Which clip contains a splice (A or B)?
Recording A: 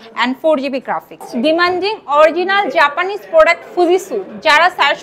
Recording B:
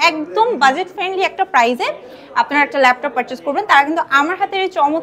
A